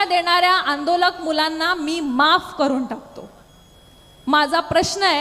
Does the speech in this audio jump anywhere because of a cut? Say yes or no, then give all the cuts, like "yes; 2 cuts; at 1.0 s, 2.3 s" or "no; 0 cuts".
no; 0 cuts